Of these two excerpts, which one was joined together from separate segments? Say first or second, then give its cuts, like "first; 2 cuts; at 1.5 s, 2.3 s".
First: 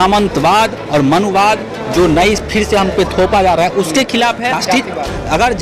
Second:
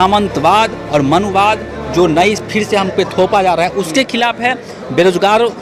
first; 1 cut; at 4.6 s